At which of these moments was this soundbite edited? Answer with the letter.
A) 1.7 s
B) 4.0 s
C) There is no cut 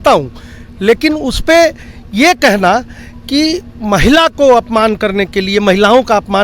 C